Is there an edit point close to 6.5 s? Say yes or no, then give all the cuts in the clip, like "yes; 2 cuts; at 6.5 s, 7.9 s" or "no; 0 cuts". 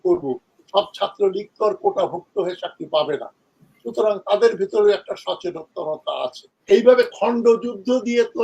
yes; 1 cut; at 6.5 s